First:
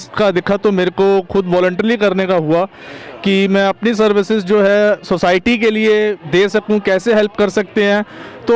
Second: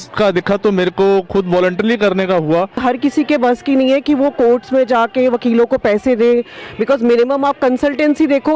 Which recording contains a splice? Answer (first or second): second